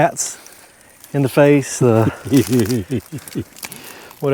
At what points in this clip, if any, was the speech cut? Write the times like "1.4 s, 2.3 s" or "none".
none